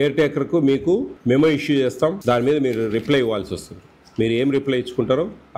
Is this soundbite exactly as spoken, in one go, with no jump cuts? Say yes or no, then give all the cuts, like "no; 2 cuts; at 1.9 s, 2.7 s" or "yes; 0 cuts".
no; 2 cuts; at 1.1 s, 2.2 s